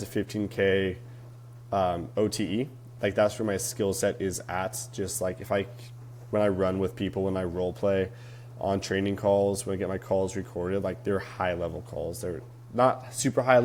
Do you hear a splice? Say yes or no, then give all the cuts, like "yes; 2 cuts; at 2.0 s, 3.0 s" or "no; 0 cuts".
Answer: no; 0 cuts